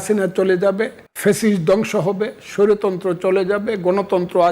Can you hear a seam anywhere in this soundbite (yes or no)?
yes